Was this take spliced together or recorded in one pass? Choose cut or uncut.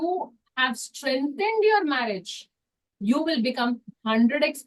uncut